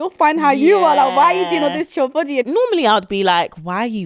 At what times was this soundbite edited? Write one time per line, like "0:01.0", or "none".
0:02.5

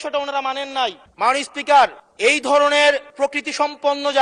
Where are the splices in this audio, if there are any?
0:01.0
0:02.0
0:03.1

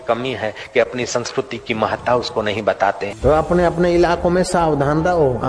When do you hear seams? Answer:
0:03.1

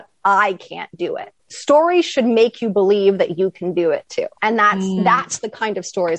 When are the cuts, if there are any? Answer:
0:04.3

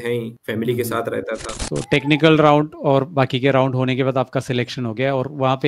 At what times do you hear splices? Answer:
0:01.6

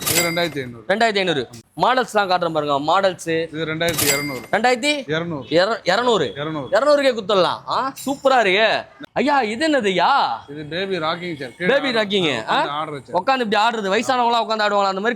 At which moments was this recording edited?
0:01.6
0:09.0

